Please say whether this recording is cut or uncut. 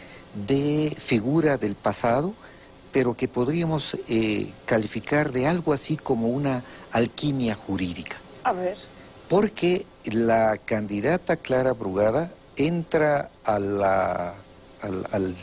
uncut